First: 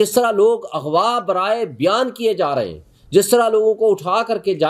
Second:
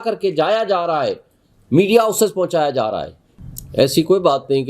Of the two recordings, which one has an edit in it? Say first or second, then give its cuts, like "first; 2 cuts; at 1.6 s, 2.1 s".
second; 1 cut; at 3.2 s